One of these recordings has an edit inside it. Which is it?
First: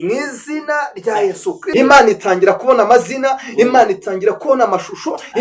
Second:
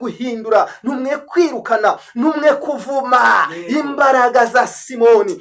first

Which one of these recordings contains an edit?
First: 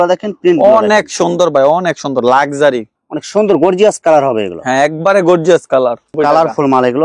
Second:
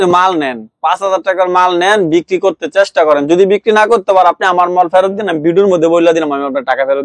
first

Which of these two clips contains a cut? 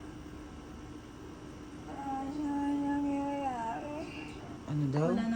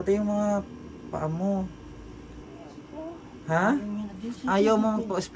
second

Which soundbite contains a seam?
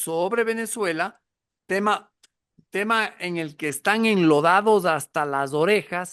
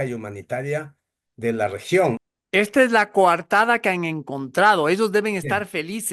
second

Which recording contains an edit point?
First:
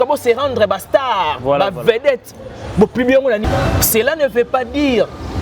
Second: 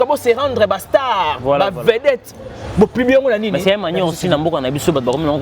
first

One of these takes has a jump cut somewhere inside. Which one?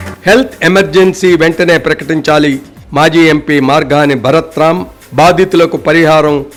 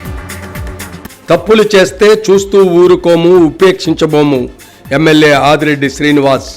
second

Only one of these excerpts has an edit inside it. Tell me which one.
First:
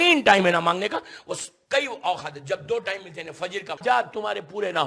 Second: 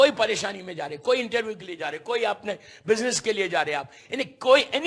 first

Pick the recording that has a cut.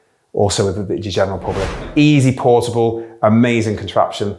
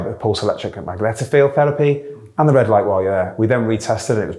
first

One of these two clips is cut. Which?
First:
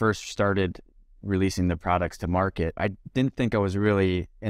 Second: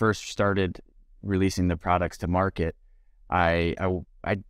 first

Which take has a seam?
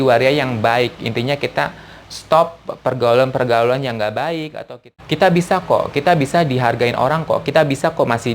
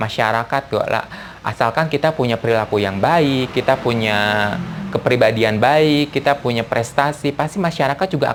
first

